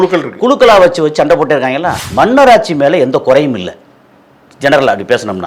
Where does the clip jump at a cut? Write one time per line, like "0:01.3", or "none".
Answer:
0:02.0